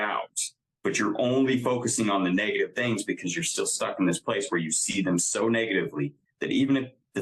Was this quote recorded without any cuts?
yes; 0 cuts

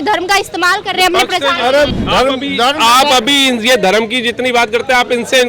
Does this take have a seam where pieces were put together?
yes; 1 cut; at 1.9 s

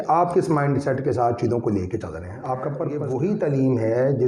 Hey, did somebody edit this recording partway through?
yes; 1 cut; at 2.9 s

